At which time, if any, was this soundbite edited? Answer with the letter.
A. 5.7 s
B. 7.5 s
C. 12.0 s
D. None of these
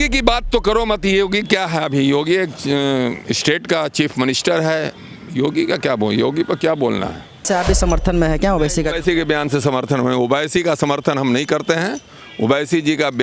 B